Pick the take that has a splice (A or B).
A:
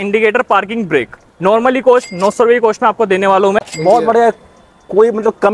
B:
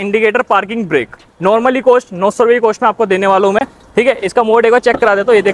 A